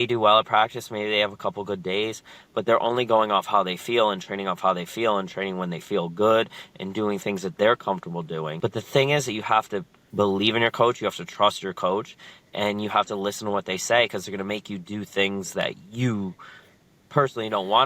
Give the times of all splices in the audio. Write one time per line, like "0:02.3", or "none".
0:08.5
0:10.0